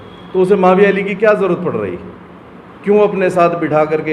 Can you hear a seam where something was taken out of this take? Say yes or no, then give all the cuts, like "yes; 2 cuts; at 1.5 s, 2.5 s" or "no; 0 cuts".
no; 0 cuts